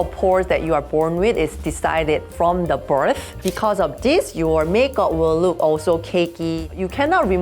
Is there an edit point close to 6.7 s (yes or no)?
yes